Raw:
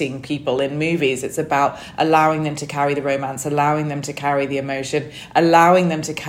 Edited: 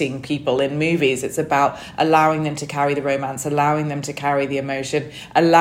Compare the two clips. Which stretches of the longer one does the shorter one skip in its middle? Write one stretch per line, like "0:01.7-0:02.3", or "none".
none